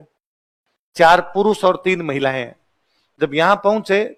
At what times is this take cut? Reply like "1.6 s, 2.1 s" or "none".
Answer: none